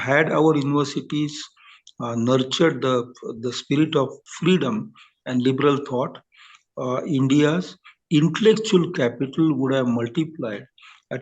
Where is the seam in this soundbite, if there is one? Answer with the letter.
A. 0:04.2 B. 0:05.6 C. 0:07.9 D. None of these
A